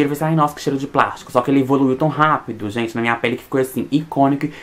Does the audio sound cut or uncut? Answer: uncut